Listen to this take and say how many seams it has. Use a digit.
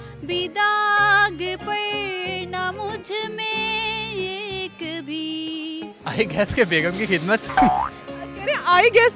1